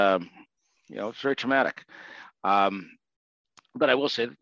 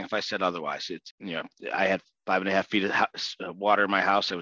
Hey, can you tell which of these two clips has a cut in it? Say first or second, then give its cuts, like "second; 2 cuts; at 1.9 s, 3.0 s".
second; 1 cut; at 1.0 s